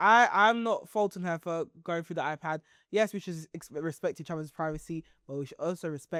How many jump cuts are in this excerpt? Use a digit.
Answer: 0